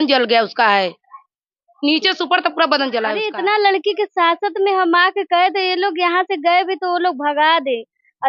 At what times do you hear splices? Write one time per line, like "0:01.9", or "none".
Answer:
0:03.2